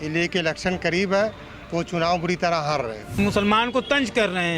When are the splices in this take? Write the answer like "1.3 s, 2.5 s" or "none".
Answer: 3.1 s